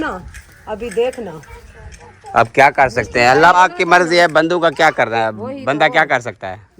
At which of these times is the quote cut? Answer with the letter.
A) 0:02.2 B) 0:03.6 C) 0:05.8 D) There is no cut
B